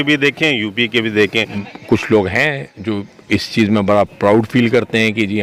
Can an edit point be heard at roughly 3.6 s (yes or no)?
no